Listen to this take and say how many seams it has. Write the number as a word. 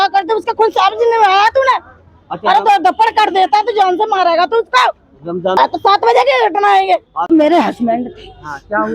two